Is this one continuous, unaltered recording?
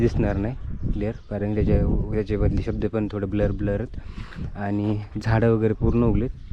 yes; 0 cuts

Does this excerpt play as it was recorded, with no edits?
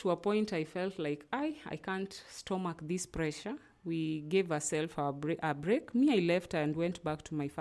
yes; 0 cuts

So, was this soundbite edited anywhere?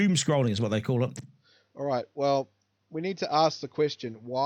no; 0 cuts

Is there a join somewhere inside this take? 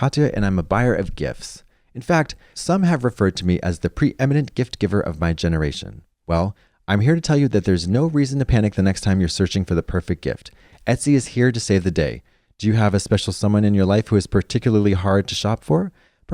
no; 0 cuts

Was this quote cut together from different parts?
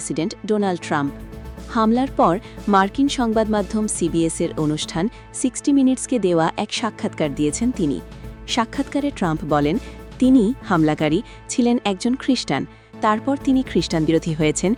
no; 0 cuts

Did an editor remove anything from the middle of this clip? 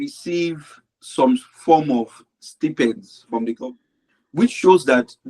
yes; 1 cut; at 3.6 s

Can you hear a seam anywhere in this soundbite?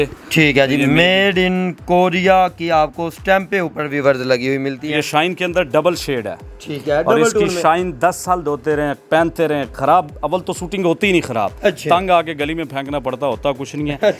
yes; 1 cut; at 5.0 s

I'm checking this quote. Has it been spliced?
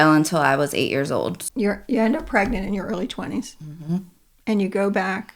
yes; 1 cut; at 1.4 s

